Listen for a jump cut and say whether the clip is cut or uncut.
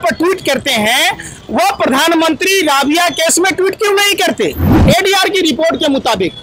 cut